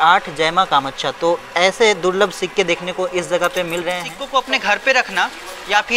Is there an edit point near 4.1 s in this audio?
yes; 1 cut; at 4.1 s

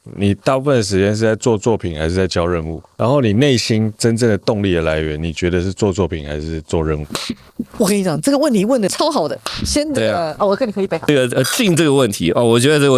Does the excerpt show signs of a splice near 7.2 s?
no; 3 cuts; at 2.8 s, 8.9 s, 11.1 s

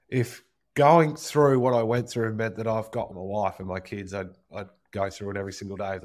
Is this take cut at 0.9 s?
no; 1 cut; at 3.1 s

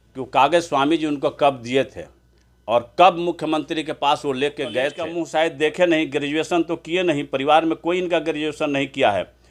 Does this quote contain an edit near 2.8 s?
no; 1 cut; at 5.1 s

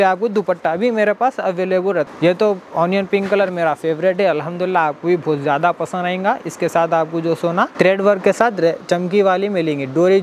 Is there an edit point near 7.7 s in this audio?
yes; 2 cuts; at 2.1 s, 7.7 s

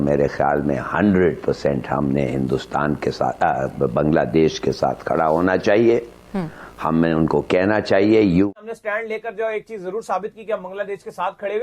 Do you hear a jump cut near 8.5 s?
yes; 1 cut; at 8.5 s

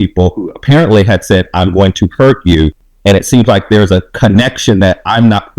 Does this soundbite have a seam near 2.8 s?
yes; 1 cut; at 2.8 s

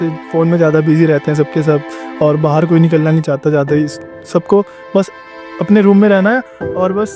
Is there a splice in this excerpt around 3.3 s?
no; 0 cuts

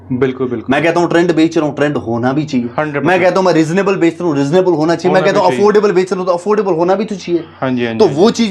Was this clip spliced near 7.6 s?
no; 0 cuts

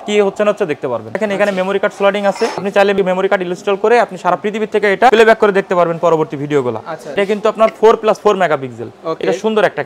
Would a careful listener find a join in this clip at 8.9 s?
no; 4 cuts; at 1.2 s, 2.8 s, 5.1 s, 7.2 s

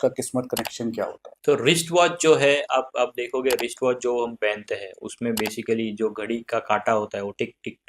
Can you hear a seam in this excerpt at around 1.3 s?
yes; 1 cut; at 1.3 s

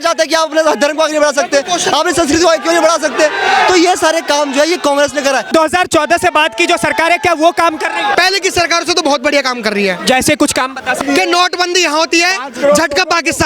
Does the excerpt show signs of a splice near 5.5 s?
yes; 3 cuts; at 5.5 s, 8.1 s, 11.0 s

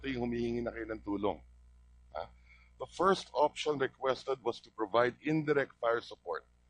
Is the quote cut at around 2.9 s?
yes; 1 cut; at 2.9 s

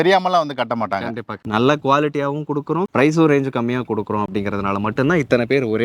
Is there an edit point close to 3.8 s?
no; 1 cut; at 1.2 s

